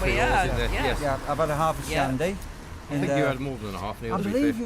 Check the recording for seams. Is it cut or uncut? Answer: uncut